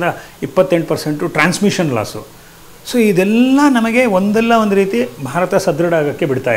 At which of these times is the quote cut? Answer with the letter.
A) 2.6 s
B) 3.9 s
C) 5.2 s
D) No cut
D